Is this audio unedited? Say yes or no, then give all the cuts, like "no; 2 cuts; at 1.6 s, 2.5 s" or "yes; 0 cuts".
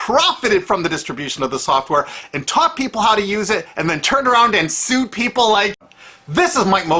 yes; 0 cuts